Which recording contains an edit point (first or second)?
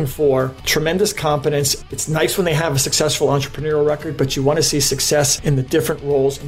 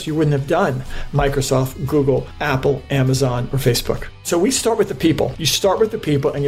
second